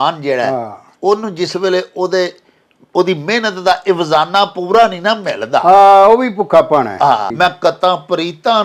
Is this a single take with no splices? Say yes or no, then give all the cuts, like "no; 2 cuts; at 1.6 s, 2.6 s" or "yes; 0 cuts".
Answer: no; 1 cut; at 7.3 s